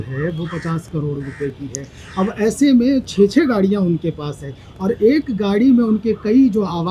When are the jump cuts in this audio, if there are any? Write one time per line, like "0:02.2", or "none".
none